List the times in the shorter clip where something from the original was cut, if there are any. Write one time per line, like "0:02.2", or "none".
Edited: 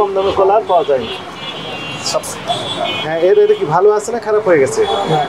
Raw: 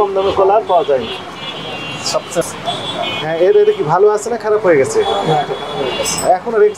0:02.3